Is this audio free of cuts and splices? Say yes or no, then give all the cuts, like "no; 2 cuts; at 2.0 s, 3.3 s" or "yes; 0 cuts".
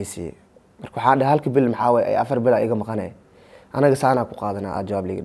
yes; 0 cuts